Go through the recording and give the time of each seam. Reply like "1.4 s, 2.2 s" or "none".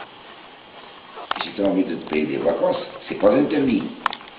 none